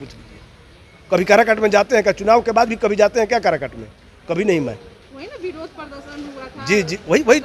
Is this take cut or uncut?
uncut